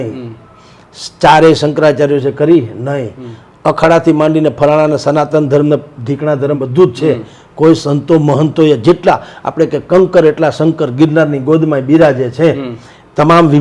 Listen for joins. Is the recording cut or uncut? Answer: uncut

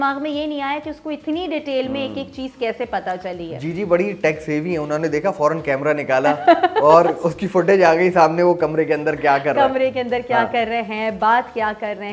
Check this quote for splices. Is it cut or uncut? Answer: uncut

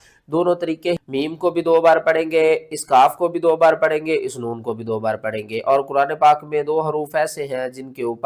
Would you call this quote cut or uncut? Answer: cut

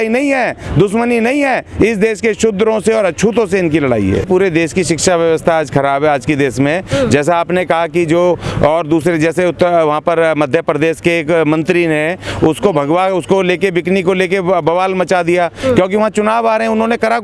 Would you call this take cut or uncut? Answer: uncut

